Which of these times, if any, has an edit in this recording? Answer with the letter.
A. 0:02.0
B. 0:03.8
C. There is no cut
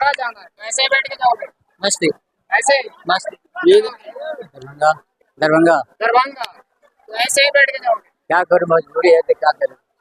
B